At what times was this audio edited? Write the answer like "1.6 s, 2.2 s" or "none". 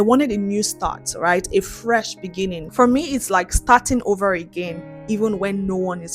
2.7 s